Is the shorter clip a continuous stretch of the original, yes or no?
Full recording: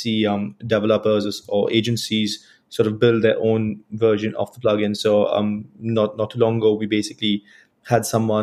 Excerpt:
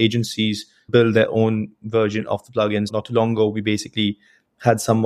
no